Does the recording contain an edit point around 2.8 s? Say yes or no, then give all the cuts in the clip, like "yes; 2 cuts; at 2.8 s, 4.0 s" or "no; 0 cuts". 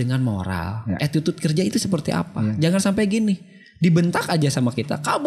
no; 1 cut; at 1.0 s